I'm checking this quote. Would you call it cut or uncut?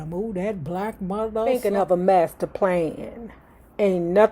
cut